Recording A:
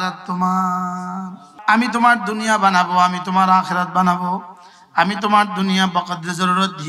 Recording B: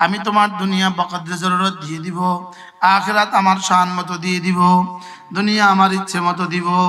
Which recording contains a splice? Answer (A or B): A